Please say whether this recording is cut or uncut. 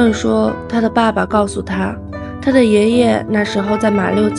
uncut